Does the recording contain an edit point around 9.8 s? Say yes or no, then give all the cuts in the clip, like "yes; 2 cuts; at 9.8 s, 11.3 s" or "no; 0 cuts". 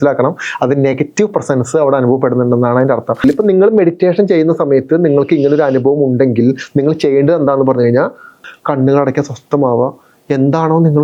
no; 2 cuts; at 3.2 s, 8.5 s